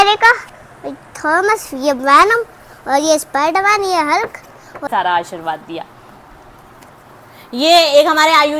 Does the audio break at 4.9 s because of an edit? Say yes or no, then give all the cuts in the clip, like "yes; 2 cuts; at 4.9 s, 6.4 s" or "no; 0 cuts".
yes; 1 cut; at 4.9 s